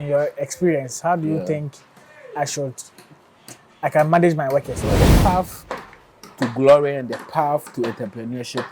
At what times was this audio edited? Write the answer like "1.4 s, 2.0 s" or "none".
5.0 s